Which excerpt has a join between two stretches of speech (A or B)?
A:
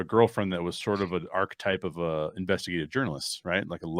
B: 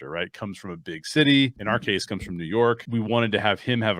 B